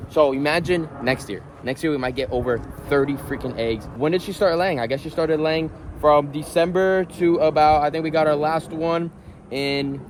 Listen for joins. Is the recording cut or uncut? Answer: uncut